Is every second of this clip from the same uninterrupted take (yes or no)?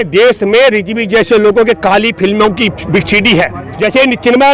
no